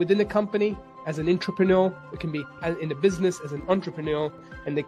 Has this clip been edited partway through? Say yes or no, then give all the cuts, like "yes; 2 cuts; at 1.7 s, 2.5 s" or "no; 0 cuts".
no; 0 cuts